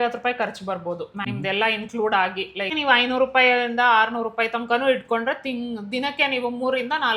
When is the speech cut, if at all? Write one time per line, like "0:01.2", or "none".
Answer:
0:01.2
0:02.7